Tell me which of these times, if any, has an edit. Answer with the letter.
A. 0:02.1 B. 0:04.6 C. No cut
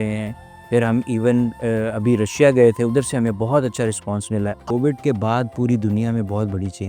B